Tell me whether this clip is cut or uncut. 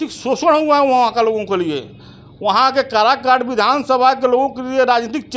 uncut